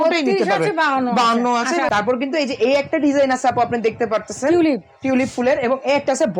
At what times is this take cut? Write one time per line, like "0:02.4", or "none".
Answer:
0:01.9